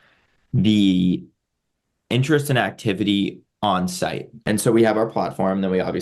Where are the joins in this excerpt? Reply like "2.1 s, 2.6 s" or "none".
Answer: 4.4 s